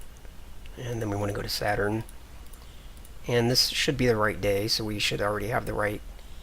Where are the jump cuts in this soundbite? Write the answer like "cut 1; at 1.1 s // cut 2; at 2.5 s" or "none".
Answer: cut 1; at 5.1 s